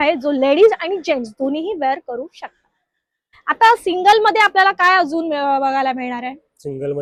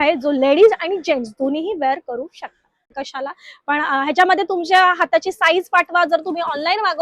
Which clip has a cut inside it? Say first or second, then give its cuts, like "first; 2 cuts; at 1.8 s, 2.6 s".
second; 1 cut; at 3.0 s